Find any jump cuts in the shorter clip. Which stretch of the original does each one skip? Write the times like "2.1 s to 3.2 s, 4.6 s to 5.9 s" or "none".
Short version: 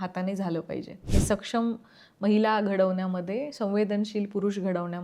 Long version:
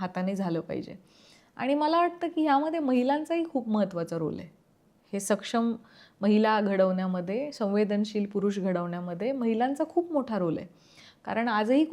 1.0 s to 5.0 s